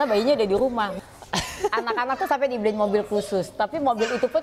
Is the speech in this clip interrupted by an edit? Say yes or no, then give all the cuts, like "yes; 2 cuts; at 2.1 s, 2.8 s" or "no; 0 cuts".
yes; 1 cut; at 0.9 s